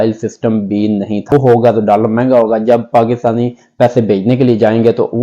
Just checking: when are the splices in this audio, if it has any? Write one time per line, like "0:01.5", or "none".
0:01.3